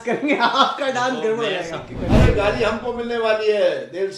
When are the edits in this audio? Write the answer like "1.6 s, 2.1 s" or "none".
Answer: 1.9 s